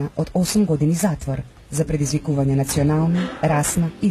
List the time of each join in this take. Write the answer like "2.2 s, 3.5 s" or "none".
none